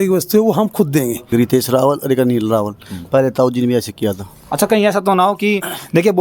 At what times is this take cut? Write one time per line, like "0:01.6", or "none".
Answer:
0:01.2